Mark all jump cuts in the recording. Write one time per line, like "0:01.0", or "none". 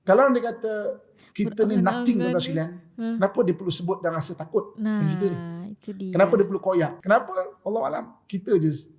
0:07.0